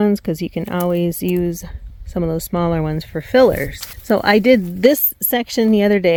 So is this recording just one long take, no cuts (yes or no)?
yes